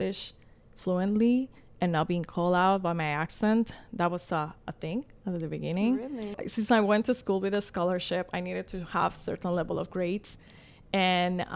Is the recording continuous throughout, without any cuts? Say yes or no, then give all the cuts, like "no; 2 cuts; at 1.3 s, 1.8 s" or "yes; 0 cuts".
no; 1 cut; at 6.4 s